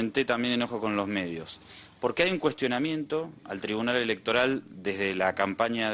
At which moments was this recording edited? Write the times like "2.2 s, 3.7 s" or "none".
3.0 s